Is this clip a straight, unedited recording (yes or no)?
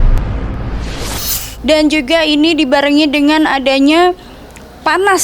yes